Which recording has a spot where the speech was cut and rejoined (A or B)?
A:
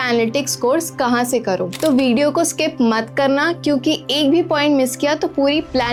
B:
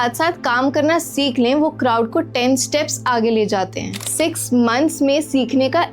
B